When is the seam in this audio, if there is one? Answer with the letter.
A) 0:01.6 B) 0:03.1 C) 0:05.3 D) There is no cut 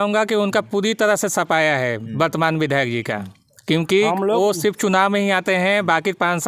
D